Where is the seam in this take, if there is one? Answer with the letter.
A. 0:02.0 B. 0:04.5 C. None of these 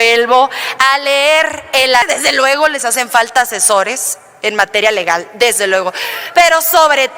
A